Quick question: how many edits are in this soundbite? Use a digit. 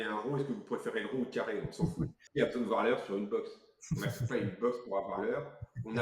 1